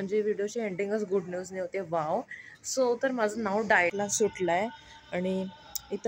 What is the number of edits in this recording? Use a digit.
1